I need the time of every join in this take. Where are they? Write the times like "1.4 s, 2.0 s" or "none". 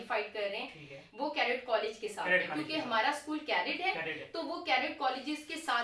none